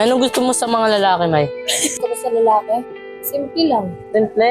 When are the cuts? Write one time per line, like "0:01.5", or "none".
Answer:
none